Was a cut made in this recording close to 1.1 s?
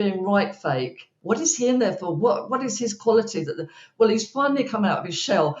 yes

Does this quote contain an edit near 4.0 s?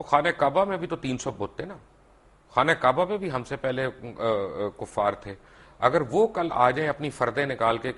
no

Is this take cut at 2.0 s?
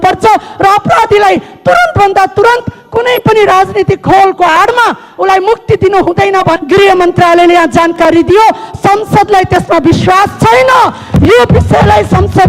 no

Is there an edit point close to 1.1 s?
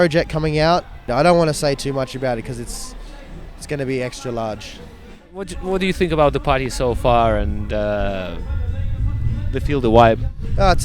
yes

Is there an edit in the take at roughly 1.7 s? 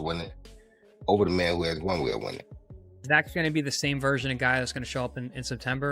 no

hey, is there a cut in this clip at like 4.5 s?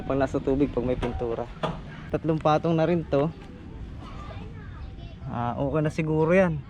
no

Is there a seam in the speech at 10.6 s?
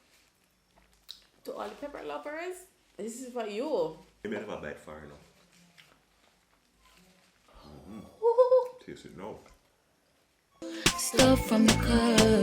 yes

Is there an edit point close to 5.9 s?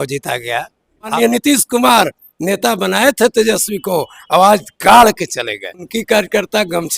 yes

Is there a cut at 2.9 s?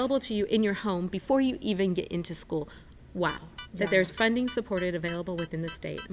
yes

